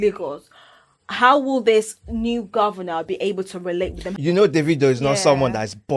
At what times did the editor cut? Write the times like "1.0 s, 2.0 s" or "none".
4.1 s